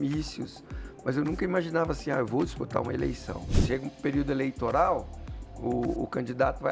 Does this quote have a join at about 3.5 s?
yes; 1 cut; at 3.5 s

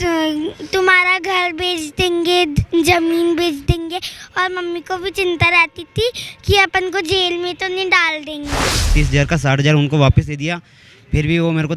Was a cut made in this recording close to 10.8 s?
no; 1 cut; at 8.9 s

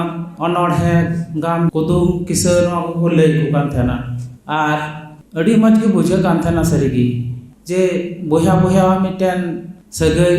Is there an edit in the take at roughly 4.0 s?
no; 1 cut; at 1.7 s

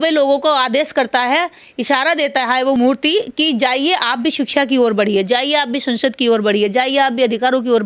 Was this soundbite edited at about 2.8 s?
yes; 1 cut; at 2.8 s

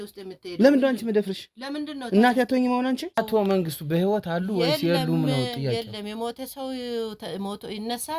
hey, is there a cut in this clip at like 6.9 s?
no; 1 cut; at 3.2 s

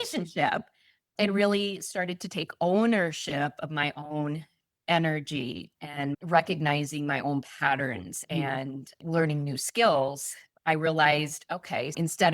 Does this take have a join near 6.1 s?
yes; 1 cut; at 6.1 s

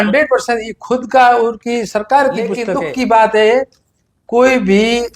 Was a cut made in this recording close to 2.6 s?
yes; 1 cut; at 2.6 s

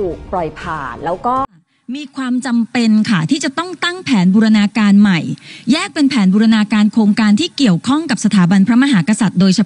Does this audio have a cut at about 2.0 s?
yes; 1 cut; at 2.0 s

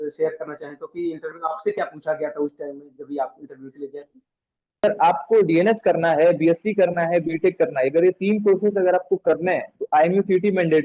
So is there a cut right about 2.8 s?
no; 1 cut; at 4.8 s

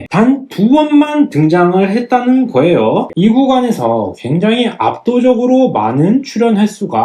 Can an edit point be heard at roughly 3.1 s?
yes; 1 cut; at 3.1 s

